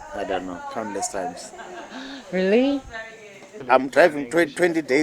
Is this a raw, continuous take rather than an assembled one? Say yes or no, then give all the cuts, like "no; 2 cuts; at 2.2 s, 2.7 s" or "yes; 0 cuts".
no; 1 cut; at 3.5 s